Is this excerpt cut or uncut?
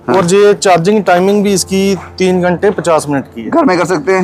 uncut